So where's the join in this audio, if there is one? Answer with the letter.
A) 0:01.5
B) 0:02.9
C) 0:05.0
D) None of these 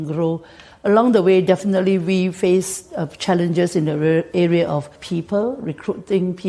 C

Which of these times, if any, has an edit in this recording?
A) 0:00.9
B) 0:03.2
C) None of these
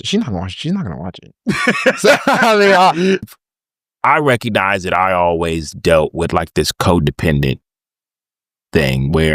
B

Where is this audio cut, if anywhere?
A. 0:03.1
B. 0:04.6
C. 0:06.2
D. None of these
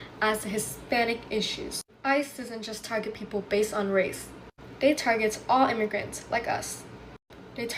D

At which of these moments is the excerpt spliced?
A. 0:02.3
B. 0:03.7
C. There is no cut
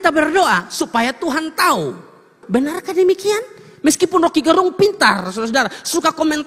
A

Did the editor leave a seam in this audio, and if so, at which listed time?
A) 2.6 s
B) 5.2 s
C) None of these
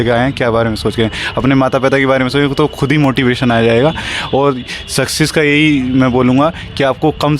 C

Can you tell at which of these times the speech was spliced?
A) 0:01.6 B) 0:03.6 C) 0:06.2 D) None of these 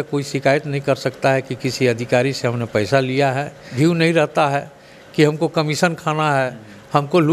B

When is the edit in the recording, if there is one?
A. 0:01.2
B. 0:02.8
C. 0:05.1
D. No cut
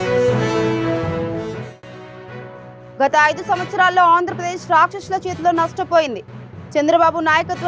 B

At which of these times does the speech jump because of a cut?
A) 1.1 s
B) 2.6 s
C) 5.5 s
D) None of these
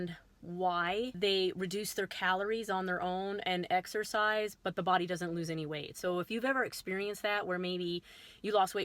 A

